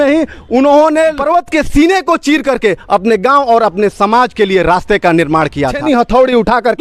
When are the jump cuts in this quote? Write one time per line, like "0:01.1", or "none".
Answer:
0:01.2
0:05.8